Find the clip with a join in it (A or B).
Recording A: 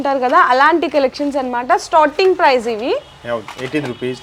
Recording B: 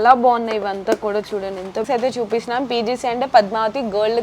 B